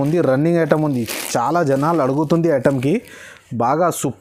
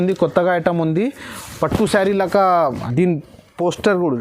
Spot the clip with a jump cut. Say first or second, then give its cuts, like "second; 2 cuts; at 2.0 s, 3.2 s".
second; 1 cut; at 2.8 s